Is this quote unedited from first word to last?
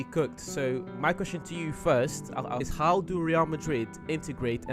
no; 1 cut; at 2.6 s

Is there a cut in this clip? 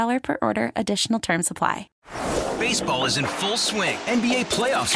yes; 1 cut; at 1.9 s

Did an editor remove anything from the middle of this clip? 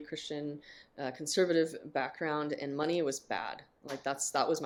no; 0 cuts

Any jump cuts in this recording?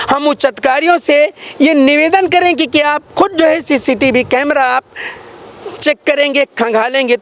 no; 0 cuts

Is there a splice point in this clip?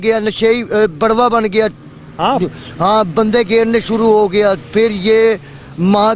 no; 0 cuts

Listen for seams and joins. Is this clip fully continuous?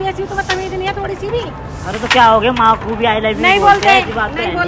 yes; 0 cuts

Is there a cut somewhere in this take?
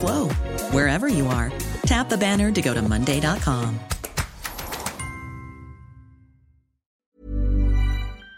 yes; 1 cut; at 7.1 s

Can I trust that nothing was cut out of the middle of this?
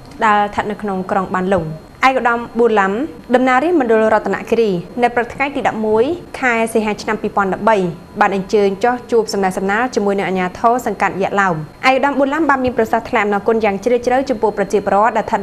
no; 5 cuts; at 1.8 s, 3.1 s, 4.9 s, 6.3 s, 11.7 s

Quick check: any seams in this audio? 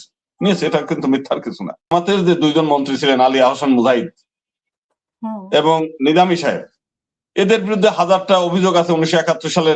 yes; 1 cut; at 1.9 s

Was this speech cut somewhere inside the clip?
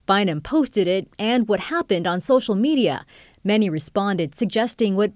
no; 0 cuts

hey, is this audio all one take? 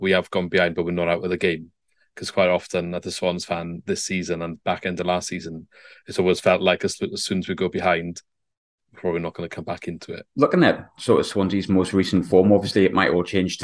no; 1 cut; at 10.3 s

